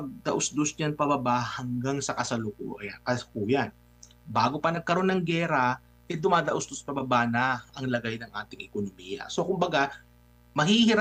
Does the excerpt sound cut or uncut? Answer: uncut